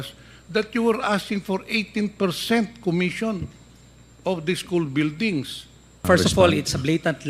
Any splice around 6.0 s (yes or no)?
yes